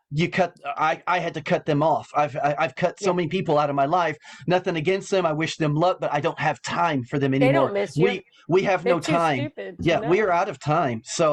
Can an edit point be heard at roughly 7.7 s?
no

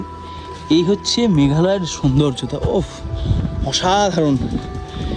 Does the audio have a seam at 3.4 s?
no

